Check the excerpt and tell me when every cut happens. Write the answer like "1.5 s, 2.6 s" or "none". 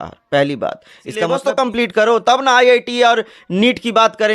1.3 s